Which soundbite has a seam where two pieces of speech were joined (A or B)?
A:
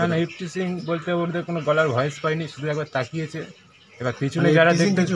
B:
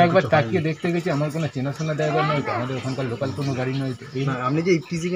B